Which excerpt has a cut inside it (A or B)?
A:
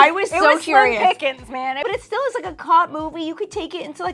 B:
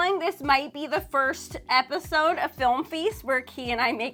A